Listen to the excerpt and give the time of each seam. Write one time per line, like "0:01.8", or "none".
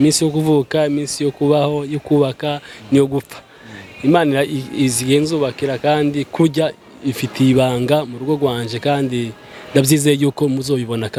none

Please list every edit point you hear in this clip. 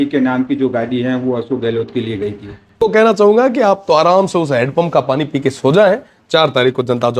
0:02.8

